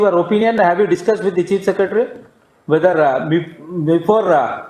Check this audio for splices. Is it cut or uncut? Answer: uncut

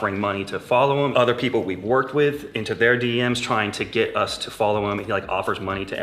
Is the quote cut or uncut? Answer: cut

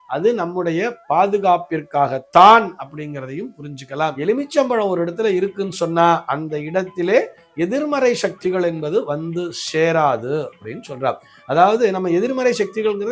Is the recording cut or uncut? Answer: cut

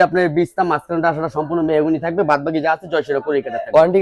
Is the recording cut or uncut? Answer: uncut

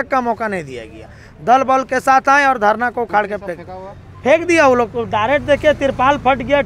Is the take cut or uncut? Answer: uncut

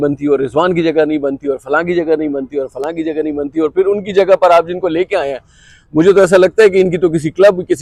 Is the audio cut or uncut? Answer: uncut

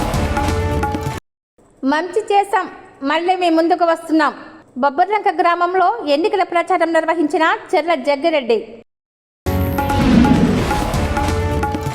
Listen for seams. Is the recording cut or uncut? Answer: cut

